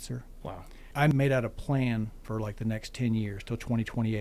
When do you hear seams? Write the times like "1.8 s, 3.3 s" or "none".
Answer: 1.1 s, 2.2 s

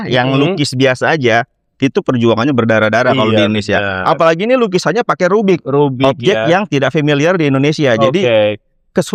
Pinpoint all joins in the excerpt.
none

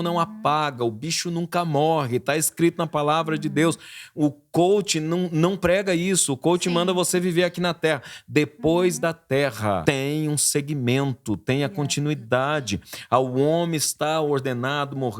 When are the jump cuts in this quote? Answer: 9.8 s

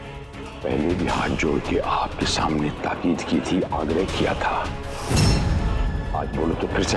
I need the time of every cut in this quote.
none

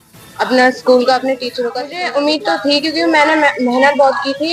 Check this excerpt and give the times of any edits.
1.7 s

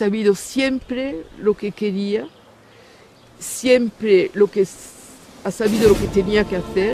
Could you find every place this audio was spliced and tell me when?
none

